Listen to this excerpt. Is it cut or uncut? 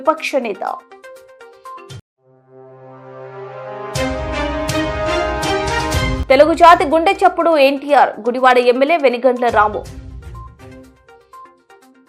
uncut